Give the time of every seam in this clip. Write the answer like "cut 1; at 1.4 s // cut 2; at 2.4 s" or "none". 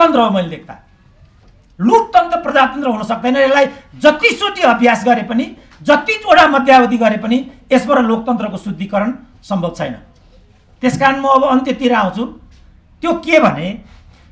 none